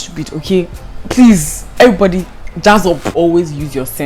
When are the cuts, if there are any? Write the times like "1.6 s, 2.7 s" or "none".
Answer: none